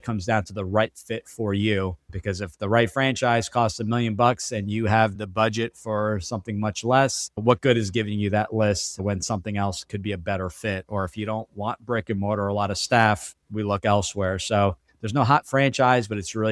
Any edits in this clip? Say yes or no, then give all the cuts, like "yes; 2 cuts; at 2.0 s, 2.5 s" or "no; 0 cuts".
no; 0 cuts